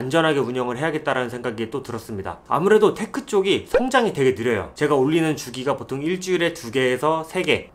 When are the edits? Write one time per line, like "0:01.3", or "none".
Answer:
0:04.7